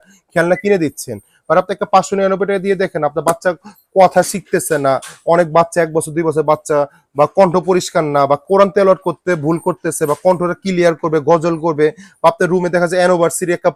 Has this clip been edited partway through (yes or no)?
no